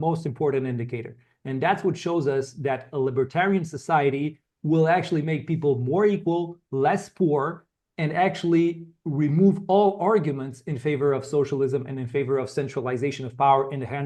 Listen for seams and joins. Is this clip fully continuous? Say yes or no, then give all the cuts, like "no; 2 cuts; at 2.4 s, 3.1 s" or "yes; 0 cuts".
yes; 0 cuts